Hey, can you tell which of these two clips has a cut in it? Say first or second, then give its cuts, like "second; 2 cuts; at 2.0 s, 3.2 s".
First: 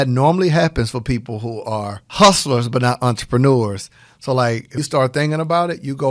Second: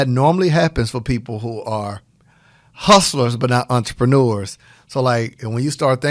first; 2 cuts; at 2.0 s, 4.8 s